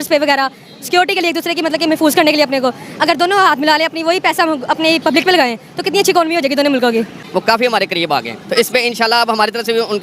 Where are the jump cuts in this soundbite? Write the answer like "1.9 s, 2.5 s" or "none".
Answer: 7.2 s

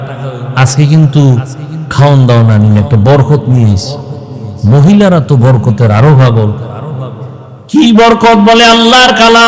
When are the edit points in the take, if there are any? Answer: 7.8 s

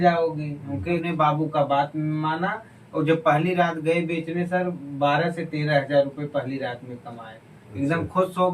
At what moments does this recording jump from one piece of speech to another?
1.0 s

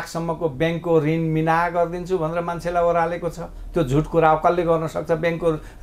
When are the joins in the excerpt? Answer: none

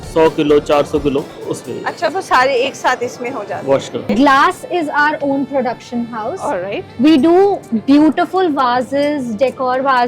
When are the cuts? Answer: 1.4 s, 4.0 s

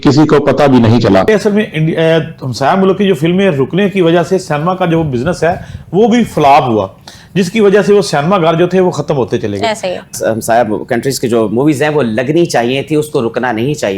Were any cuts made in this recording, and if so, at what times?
1.3 s, 10.1 s

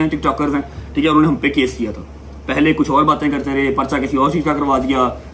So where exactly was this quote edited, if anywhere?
none

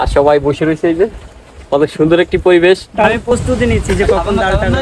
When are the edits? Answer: 3.2 s

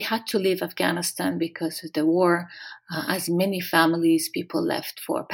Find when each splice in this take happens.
none

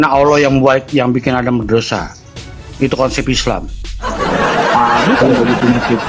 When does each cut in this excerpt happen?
none

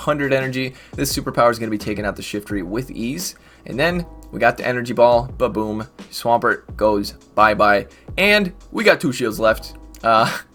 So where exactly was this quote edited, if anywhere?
none

